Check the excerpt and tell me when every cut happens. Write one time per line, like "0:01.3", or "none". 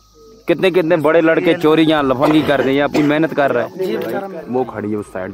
0:04.3